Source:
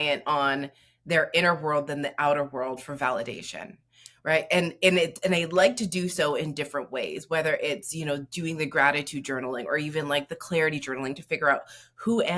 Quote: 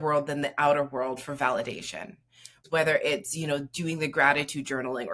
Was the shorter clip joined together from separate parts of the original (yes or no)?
yes